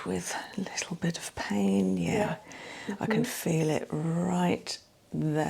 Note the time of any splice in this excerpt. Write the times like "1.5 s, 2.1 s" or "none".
none